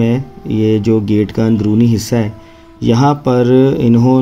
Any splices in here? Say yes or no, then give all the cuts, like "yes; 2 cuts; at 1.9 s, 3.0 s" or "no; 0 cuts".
no; 0 cuts